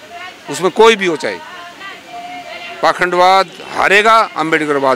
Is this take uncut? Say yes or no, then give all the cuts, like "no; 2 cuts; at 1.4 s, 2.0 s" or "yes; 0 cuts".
yes; 0 cuts